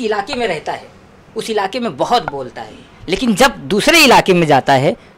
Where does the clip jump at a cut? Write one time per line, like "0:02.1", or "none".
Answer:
none